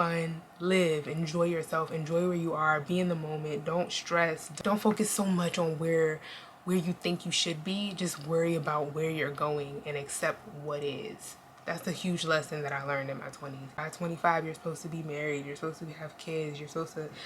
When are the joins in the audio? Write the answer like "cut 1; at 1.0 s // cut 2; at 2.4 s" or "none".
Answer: cut 1; at 4.5 s // cut 2; at 13.6 s